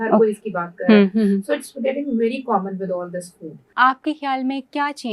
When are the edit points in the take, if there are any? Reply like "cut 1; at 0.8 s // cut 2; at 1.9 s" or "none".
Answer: cut 1; at 3.6 s